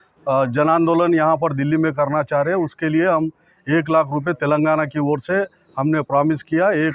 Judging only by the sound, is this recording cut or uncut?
uncut